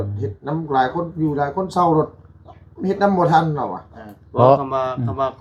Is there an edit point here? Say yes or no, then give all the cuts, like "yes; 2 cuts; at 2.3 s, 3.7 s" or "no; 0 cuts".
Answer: no; 0 cuts